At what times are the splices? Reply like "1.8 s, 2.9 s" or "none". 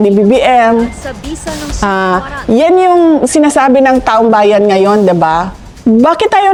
none